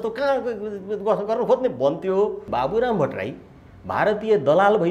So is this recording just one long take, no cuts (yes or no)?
no